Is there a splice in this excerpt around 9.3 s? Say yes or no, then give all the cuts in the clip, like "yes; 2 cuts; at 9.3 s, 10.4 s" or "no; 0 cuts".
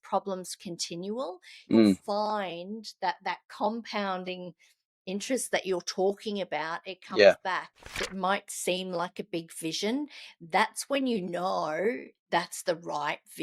no; 1 cut; at 8.1 s